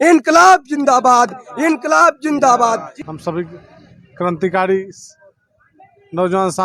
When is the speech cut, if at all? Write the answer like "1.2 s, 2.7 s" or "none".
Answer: 3.0 s